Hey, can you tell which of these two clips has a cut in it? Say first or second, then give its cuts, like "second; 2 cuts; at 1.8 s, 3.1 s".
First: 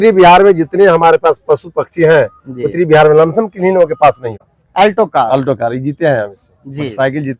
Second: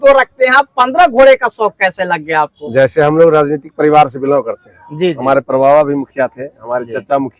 first; 1 cut; at 4.5 s